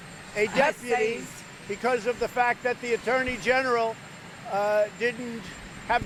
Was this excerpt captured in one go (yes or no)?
yes